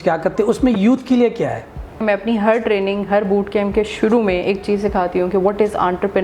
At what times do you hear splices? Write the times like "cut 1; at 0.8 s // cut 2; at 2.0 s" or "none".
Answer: cut 1; at 2.0 s